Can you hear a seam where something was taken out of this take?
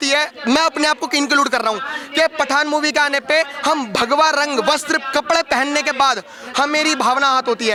no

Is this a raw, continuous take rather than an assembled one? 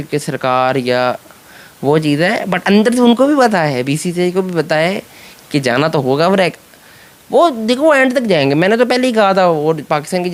yes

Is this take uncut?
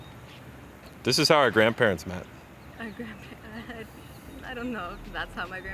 no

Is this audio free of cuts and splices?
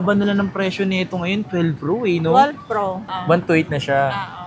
no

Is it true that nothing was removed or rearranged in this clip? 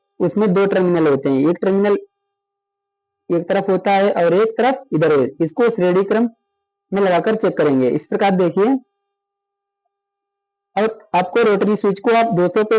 yes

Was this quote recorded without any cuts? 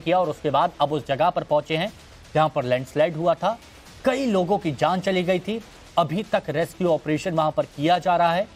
no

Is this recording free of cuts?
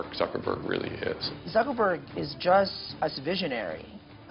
no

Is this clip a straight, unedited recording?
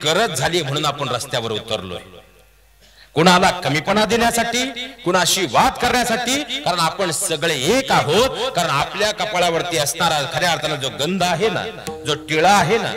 yes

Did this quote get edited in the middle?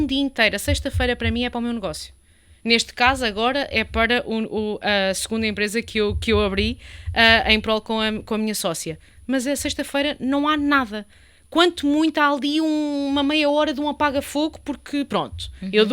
no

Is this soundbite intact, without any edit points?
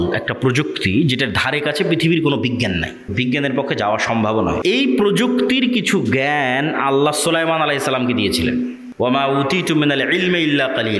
no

